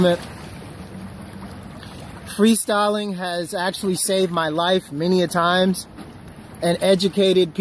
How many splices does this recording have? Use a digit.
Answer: 1